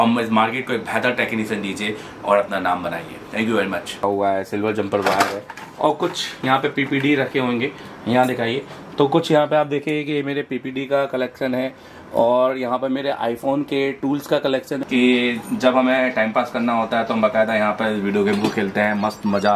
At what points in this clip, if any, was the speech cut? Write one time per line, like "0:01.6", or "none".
0:04.0
0:14.7